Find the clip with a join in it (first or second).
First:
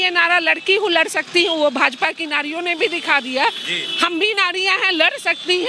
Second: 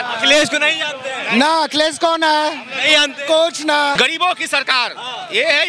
second